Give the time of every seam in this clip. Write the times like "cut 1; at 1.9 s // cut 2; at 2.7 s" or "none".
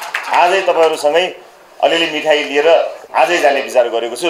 cut 1; at 3.0 s